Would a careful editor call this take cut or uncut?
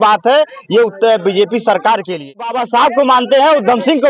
cut